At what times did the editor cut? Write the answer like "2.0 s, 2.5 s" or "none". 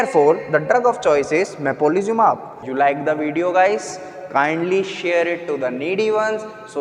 2.5 s